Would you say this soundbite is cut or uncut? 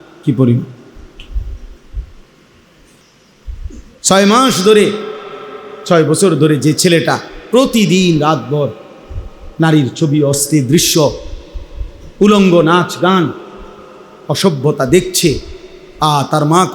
cut